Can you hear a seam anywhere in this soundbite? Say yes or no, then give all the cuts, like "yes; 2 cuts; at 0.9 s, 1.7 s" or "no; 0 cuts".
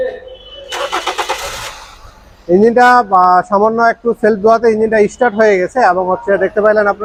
no; 0 cuts